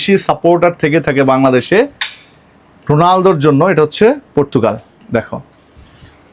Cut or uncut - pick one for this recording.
uncut